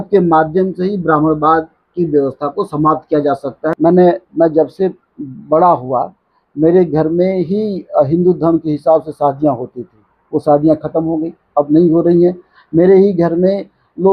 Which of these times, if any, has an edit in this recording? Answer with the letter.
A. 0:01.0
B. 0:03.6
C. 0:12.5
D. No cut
B